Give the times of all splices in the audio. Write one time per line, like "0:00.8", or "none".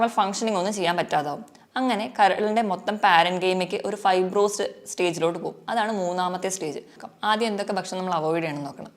0:07.0